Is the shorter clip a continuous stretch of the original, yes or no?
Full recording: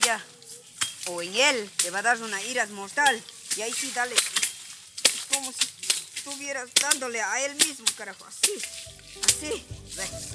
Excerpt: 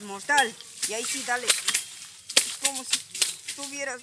yes